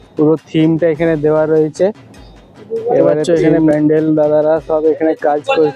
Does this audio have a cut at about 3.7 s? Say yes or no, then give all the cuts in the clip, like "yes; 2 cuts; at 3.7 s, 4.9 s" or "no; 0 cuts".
yes; 1 cut; at 3.7 s